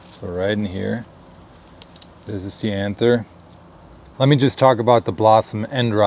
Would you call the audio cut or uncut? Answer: cut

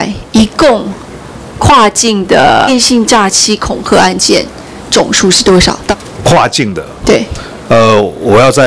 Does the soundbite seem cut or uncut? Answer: cut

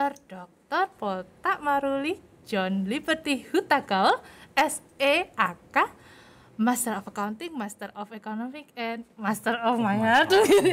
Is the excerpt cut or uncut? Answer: uncut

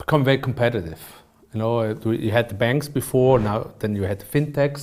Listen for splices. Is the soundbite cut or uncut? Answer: uncut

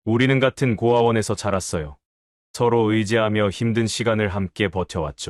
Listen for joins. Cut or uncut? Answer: uncut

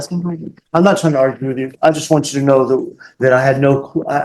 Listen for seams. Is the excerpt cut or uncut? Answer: uncut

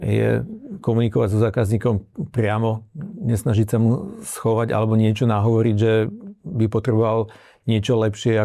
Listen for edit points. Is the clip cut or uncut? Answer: uncut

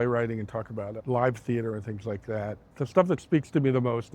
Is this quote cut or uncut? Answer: cut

